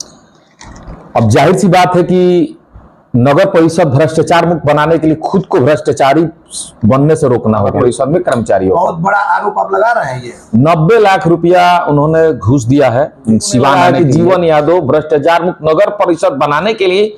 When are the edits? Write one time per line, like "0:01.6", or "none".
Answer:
0:07.8
0:13.7